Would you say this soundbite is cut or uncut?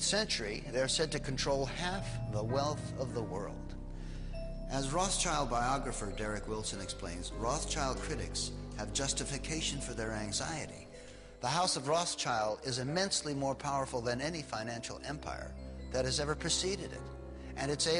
cut